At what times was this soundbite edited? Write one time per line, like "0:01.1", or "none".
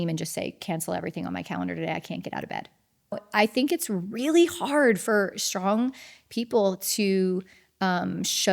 0:03.2